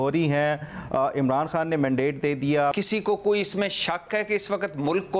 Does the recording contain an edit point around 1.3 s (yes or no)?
no